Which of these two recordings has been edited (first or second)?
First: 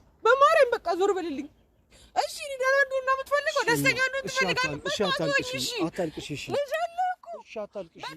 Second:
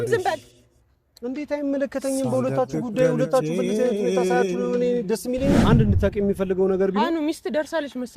second